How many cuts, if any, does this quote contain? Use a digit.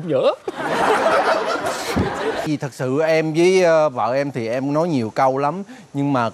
1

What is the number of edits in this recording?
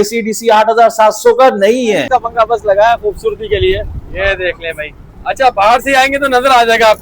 1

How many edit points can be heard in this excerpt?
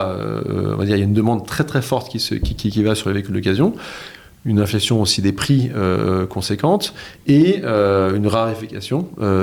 0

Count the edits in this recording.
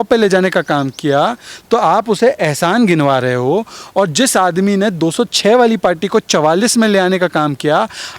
0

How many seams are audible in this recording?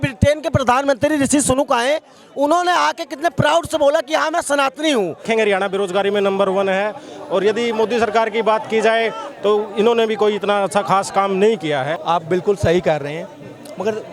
2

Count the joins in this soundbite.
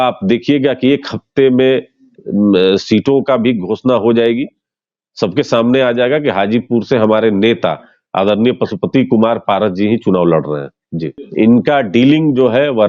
1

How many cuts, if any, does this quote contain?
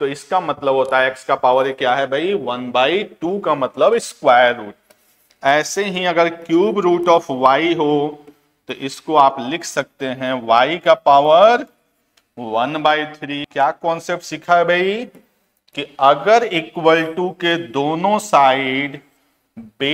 1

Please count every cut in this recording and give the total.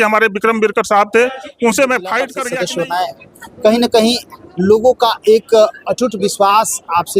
1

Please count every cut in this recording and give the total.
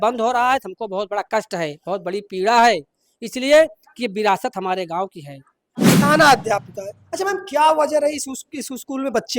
1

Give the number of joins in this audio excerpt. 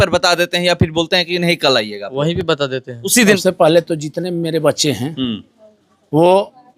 1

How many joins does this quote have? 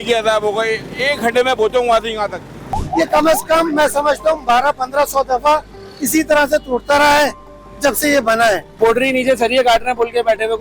2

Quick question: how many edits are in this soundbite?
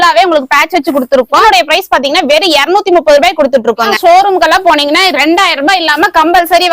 2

